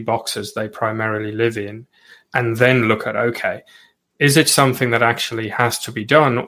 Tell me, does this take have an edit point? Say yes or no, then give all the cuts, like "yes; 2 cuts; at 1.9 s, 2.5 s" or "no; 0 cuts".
yes; 1 cut; at 4.2 s